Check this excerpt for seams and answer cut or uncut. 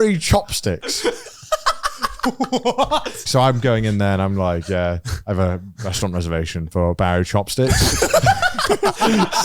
cut